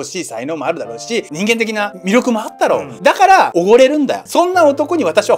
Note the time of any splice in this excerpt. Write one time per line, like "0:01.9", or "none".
none